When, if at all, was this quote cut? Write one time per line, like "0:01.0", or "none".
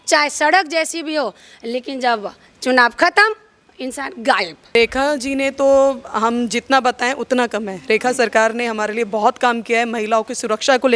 0:04.8